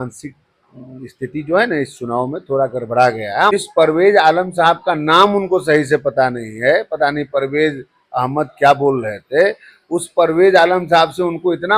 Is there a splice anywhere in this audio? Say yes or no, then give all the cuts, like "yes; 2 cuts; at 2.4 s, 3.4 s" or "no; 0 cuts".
yes; 1 cut; at 3.5 s